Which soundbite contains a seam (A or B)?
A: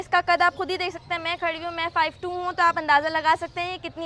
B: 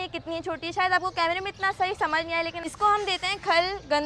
B